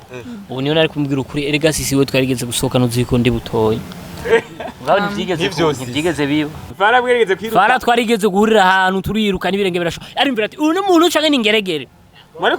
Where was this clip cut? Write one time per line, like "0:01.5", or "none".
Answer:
0:06.7